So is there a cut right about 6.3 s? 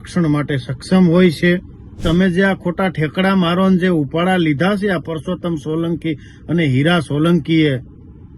no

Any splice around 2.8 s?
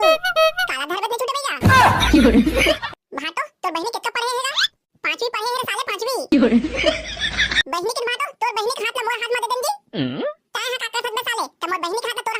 yes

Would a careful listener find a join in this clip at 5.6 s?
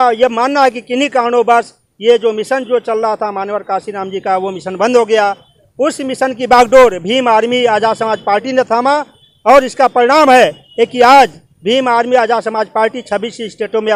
no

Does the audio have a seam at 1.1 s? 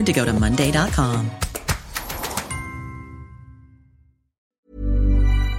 no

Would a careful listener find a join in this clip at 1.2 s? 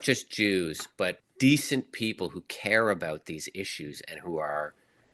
yes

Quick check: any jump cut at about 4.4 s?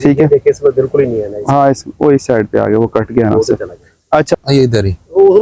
yes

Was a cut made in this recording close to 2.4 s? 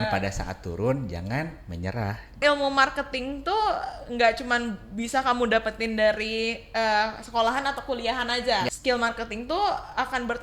yes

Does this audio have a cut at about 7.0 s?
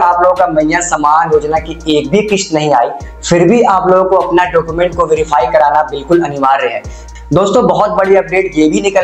yes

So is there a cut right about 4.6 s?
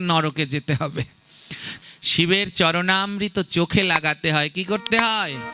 no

